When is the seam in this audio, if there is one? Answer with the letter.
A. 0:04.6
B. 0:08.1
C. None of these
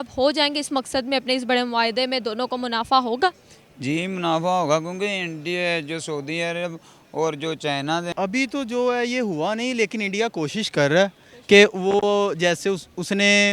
B